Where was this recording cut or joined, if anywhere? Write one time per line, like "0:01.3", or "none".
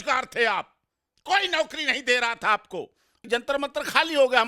0:03.2

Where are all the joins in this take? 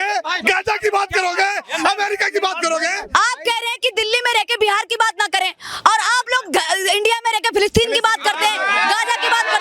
0:03.0

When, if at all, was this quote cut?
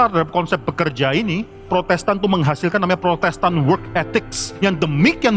0:01.7
0:04.4

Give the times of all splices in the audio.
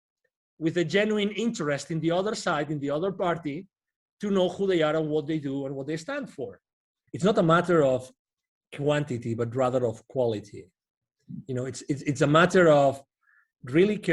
0:07.0

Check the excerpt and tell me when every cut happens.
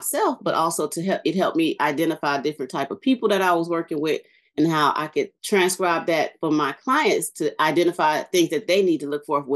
0:05.4

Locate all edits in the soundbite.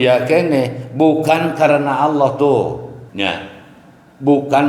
0:03.0

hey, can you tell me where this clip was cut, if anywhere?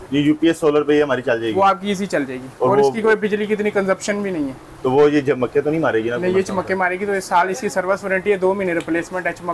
none

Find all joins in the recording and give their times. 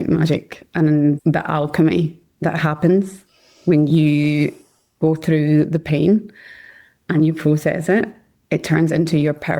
0:01.2

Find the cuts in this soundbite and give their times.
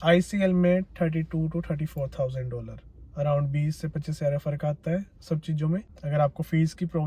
0:05.9

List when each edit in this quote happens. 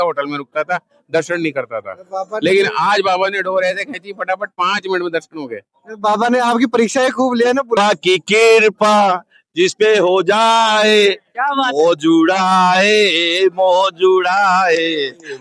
0:07.8

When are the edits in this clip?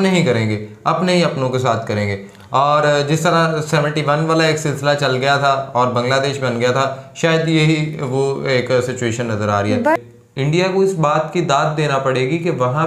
0:09.9

